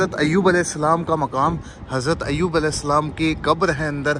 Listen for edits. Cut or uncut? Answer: uncut